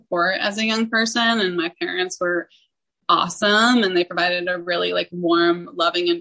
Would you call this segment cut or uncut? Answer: uncut